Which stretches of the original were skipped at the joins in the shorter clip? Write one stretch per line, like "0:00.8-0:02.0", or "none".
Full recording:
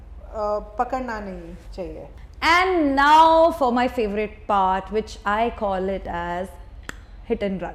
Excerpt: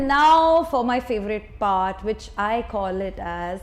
none